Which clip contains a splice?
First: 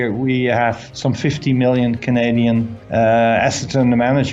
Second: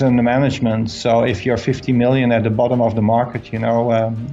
first; 2 cuts; at 0.8 s, 2.8 s

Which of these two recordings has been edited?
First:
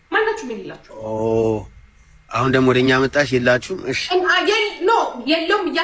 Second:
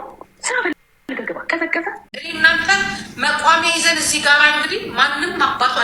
second; 1 cut; at 2.1 s

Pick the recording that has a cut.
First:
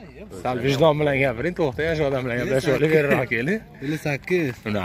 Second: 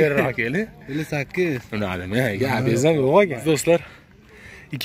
second; 1 cut; at 3.4 s

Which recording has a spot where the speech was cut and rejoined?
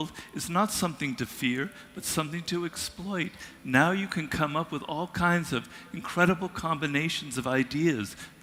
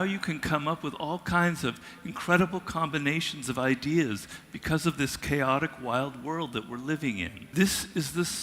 second; 1 cut; at 7.3 s

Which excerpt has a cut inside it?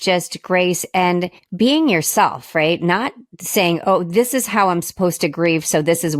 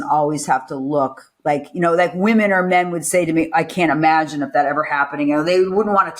first; 1 cut; at 1.4 s

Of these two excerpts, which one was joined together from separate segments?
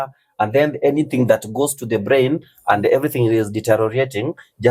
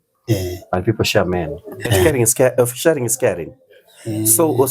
second; 1 cut; at 2.0 s

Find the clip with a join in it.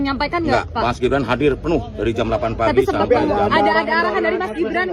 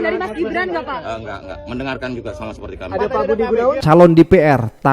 second; 1 cut; at 3.8 s

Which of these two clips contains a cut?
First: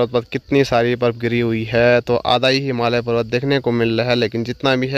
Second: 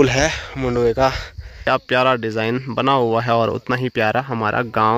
second; 1 cut; at 1.6 s

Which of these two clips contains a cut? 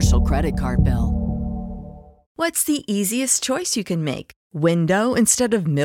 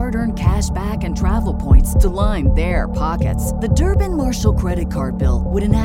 first; 1 cut; at 2.2 s

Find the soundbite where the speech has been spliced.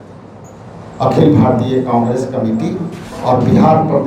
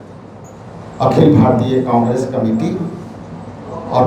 first; 1 cut; at 3.0 s

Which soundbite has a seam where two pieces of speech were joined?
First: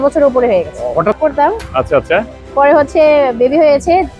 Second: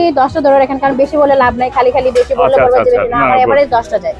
first; 1 cut; at 1.2 s

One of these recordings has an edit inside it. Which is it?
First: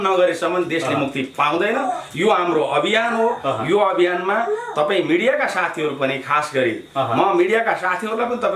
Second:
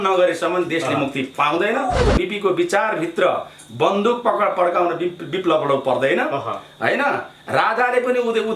second; 1 cut; at 2.1 s

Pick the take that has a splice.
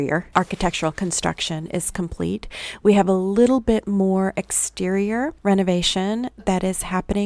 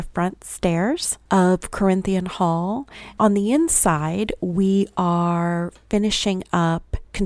second; 2 cuts; at 1.1 s, 3.0 s

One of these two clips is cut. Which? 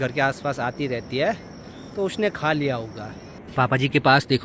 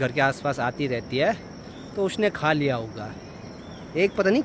first; 1 cut; at 3.4 s

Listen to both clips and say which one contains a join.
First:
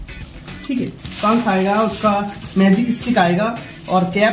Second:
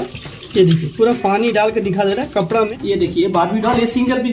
second; 1 cut; at 2.7 s

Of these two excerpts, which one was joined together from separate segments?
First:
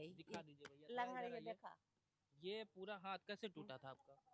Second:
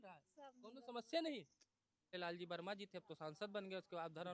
second; 1 cut; at 2.1 s

